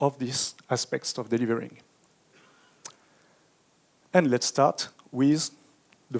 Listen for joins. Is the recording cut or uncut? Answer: uncut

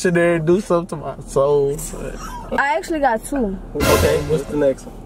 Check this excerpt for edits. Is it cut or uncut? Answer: cut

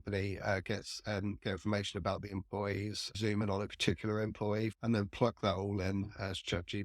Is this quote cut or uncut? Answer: cut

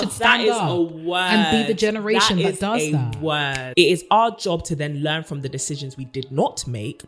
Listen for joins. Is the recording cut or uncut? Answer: cut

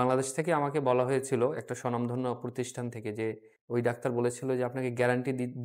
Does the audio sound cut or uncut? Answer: cut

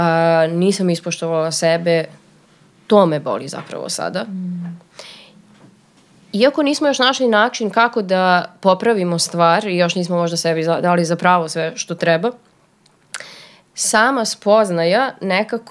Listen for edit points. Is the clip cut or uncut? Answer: uncut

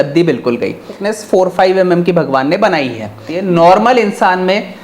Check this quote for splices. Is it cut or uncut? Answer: cut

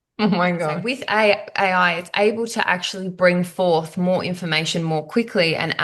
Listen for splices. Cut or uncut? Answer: cut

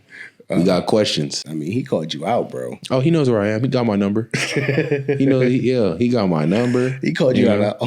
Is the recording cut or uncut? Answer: cut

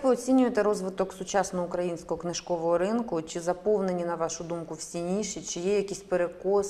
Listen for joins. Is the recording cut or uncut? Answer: uncut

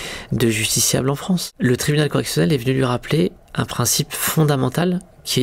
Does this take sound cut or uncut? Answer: cut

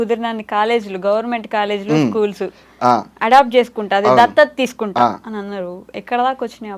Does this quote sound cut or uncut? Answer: uncut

